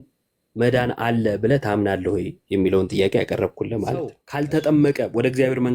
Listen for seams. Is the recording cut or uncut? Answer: cut